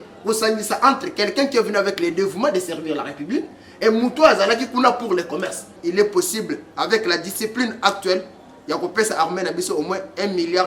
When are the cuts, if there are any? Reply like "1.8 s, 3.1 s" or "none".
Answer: 5.7 s

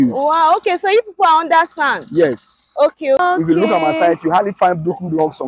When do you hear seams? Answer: 3.2 s

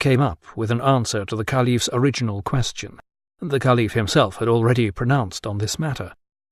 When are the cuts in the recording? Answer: 3.8 s

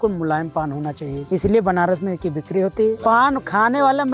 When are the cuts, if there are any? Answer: 1.1 s, 3.0 s

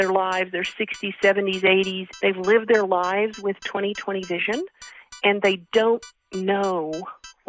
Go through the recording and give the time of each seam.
2.0 s

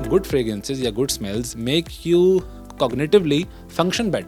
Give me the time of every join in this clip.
none

